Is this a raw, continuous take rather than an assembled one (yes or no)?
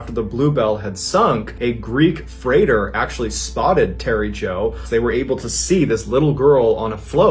no